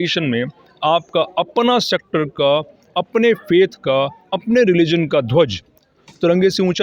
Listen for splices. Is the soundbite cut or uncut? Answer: uncut